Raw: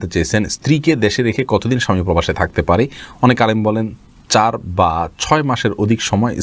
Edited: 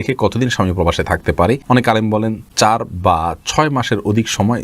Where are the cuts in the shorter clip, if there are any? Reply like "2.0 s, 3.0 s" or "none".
1.6 s, 2.4 s